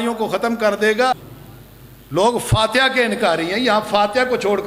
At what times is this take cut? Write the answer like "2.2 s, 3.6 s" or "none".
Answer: 1.3 s